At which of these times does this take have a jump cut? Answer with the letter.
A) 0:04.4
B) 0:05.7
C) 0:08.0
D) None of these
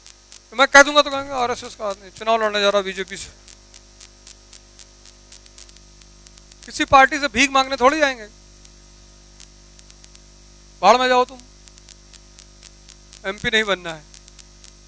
B